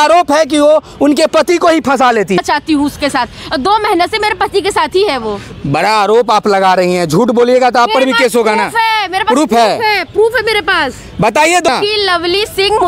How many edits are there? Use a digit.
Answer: 2